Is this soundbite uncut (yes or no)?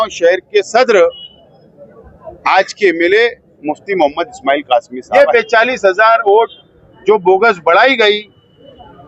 no